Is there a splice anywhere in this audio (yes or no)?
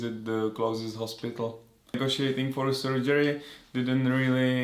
yes